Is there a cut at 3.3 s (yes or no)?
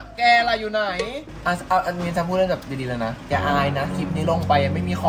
no